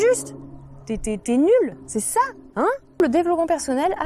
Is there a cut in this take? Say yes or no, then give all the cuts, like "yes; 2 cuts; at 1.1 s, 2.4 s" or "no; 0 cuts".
yes; 2 cuts; at 1.8 s, 3.0 s